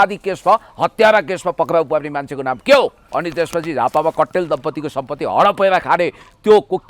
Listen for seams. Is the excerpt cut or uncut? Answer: cut